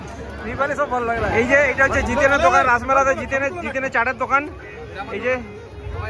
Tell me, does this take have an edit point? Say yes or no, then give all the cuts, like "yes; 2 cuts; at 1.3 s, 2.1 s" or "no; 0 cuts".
yes; 1 cut; at 1.3 s